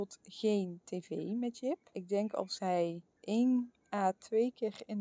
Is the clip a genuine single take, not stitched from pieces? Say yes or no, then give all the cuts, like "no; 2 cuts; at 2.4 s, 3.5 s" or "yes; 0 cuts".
no; 3 cuts; at 2.0 s, 3.1 s, 3.8 s